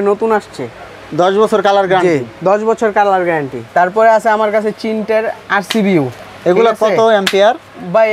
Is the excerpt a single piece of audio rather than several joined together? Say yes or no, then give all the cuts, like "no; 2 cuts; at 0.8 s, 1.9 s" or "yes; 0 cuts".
yes; 0 cuts